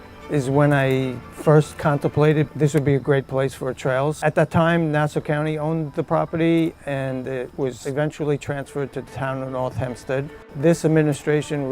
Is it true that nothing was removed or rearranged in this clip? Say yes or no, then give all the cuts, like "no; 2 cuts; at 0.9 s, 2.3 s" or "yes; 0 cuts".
no; 3 cuts; at 4.2 s, 7.8 s, 10.4 s